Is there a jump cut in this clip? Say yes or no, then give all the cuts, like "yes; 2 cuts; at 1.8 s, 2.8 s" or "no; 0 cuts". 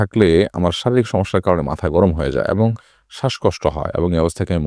no; 0 cuts